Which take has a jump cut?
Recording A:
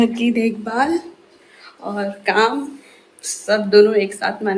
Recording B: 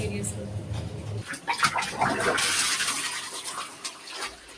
B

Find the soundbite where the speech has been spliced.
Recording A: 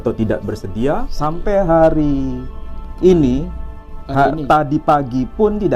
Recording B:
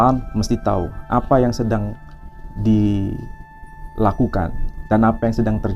A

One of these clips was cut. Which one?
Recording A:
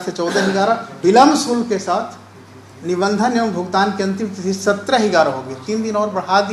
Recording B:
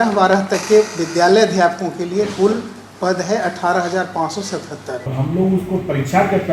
B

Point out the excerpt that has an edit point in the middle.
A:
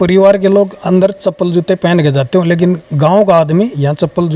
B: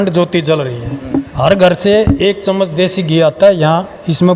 B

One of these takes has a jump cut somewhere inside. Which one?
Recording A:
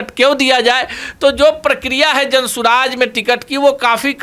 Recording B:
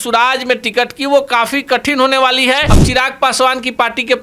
B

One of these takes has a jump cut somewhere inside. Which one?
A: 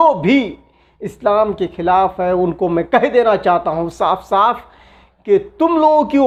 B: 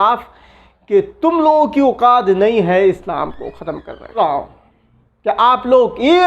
B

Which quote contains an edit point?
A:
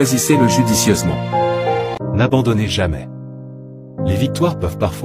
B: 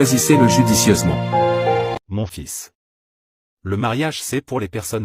A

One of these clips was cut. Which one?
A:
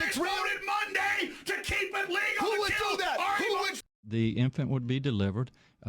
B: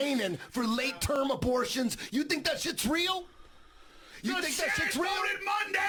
A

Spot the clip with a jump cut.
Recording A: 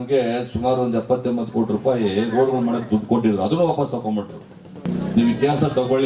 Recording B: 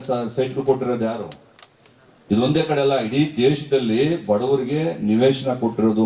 A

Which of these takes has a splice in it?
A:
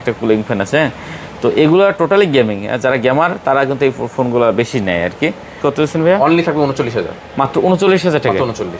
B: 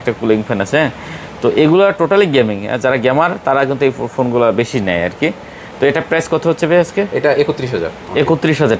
A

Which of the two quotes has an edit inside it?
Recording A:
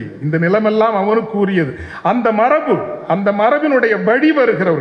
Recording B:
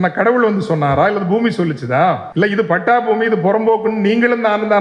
B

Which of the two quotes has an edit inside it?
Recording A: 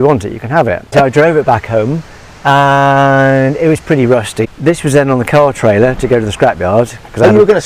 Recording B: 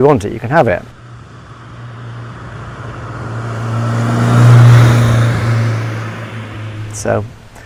A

